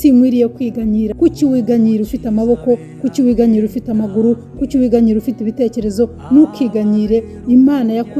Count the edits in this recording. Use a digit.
2